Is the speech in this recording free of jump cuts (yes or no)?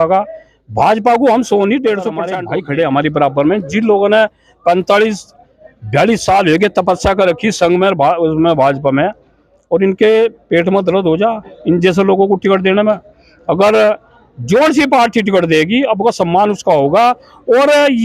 no